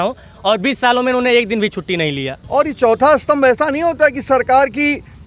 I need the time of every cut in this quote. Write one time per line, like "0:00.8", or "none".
0:02.3